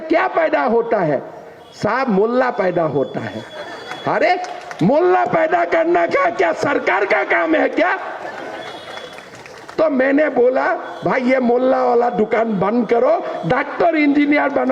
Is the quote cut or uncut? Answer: uncut